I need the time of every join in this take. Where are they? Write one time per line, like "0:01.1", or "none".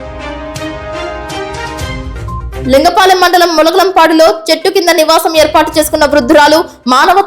0:00.9